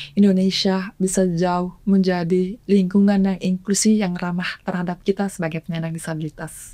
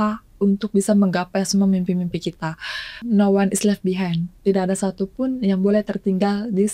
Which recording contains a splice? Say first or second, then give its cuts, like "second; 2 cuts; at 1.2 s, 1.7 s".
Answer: second; 1 cut; at 3.1 s